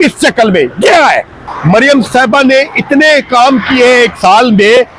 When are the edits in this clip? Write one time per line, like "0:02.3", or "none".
0:01.5